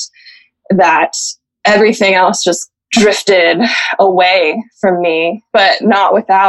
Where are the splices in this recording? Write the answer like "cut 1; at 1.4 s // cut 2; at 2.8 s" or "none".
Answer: cut 1; at 2.7 s // cut 2; at 5.4 s